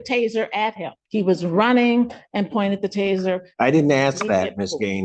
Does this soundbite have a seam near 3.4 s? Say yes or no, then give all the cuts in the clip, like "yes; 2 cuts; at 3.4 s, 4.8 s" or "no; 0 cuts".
no; 1 cut; at 1.0 s